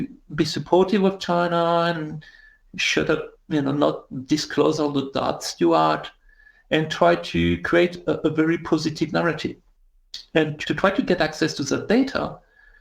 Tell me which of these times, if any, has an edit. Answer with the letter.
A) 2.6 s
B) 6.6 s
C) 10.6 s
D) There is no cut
C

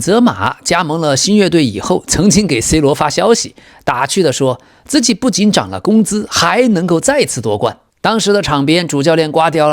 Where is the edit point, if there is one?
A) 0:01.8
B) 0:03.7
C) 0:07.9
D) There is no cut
C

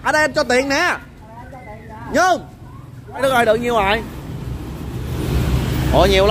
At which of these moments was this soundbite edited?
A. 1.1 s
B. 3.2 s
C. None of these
B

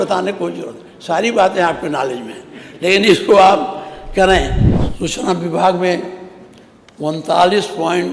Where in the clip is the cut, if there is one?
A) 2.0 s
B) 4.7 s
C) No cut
B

